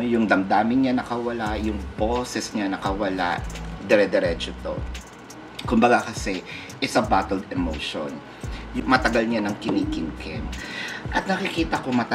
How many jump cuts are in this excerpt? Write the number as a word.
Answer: one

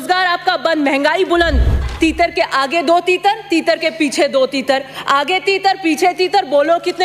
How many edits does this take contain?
one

